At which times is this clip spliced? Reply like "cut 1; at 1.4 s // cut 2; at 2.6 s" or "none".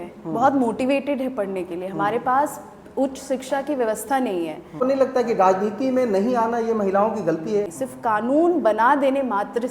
cut 1; at 4.8 s // cut 2; at 7.7 s